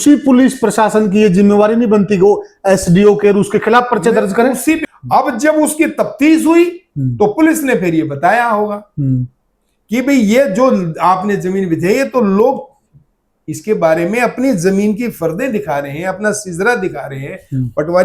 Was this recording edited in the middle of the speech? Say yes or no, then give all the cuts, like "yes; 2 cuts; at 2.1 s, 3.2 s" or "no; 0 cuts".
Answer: yes; 1 cut; at 4.8 s